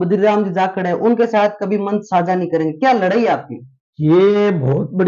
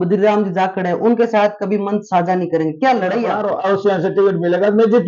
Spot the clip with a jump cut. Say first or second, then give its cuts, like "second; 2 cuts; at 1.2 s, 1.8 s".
second; 1 cut; at 3.9 s